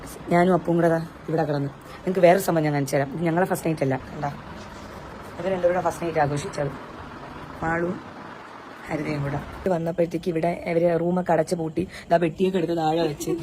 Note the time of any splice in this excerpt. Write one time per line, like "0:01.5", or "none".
0:09.7